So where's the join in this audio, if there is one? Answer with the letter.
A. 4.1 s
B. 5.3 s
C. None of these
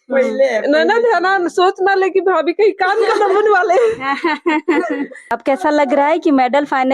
B